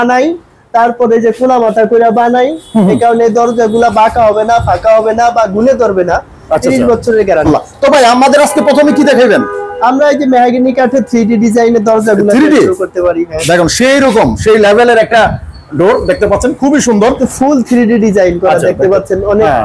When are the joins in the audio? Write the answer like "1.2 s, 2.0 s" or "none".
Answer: none